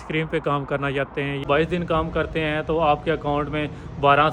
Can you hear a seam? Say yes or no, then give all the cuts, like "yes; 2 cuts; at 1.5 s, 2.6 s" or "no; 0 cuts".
yes; 1 cut; at 1.4 s